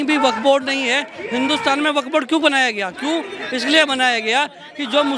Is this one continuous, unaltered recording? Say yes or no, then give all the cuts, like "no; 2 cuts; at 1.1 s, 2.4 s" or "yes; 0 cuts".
yes; 0 cuts